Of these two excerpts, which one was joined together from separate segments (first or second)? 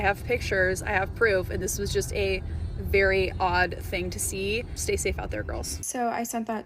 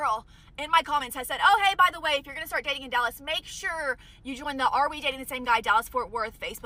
first